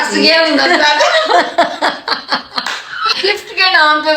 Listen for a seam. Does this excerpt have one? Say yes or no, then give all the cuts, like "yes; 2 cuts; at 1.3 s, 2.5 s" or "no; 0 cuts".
yes; 1 cut; at 3.1 s